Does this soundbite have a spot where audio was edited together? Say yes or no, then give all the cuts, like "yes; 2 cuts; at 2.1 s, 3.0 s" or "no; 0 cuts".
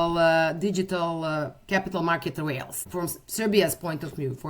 yes; 1 cut; at 2.8 s